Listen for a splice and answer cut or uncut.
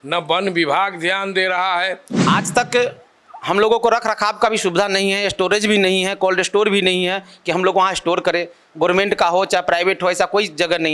cut